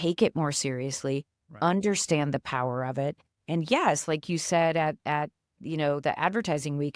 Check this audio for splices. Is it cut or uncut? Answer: uncut